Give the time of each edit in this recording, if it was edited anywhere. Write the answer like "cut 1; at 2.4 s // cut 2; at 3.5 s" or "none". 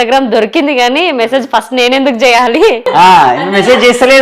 cut 1; at 2.8 s